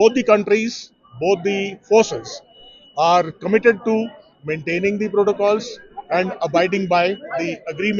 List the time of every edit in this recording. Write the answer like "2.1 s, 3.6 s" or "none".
none